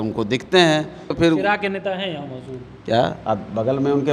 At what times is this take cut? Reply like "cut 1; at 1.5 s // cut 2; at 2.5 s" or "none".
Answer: cut 1; at 1.1 s

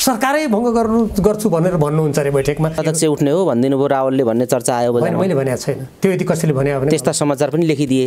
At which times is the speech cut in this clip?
cut 1; at 2.8 s

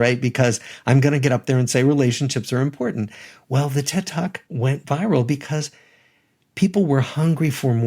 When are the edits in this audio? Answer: cut 1; at 4.4 s

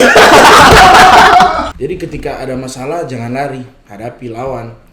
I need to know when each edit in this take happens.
cut 1; at 1.7 s

